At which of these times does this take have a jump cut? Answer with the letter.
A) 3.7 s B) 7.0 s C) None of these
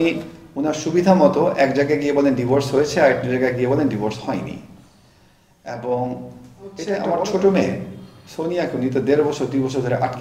B